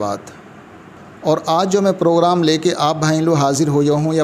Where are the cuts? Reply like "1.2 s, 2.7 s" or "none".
none